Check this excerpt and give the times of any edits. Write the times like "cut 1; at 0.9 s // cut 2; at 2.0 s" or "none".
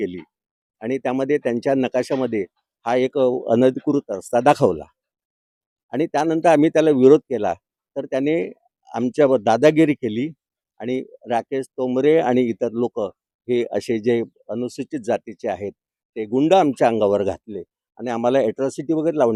none